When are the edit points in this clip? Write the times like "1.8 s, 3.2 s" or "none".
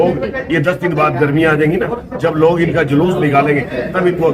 none